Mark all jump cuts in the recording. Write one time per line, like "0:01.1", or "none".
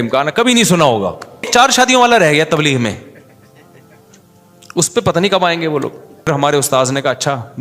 0:01.5
0:06.3